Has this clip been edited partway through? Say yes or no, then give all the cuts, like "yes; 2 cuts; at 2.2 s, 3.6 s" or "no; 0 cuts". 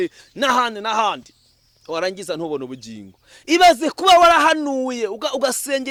no; 0 cuts